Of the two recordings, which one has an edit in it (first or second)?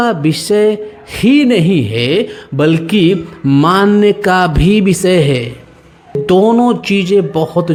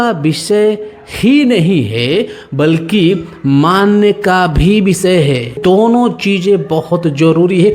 second